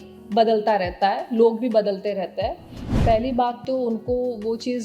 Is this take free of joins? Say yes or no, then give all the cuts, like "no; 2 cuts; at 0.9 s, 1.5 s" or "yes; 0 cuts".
no; 1 cut; at 2.9 s